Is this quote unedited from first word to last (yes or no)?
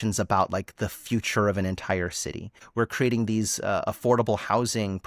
no